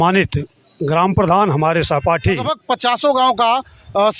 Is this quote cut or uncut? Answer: cut